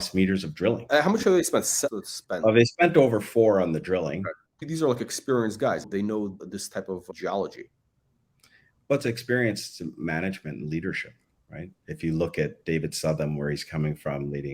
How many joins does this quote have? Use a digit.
0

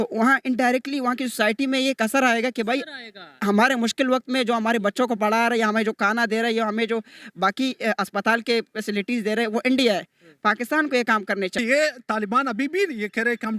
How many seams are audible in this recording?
1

